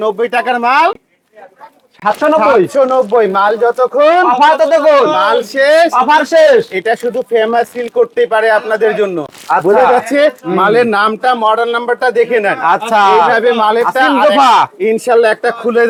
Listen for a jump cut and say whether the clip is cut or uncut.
uncut